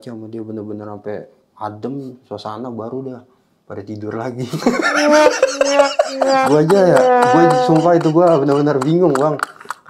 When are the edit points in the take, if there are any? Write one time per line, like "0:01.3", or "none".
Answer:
none